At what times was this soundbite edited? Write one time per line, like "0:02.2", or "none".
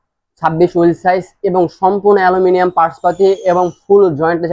none